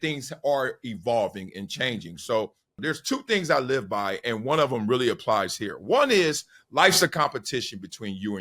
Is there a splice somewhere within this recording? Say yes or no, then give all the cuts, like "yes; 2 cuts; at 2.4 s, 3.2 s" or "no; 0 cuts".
yes; 1 cut; at 2.7 s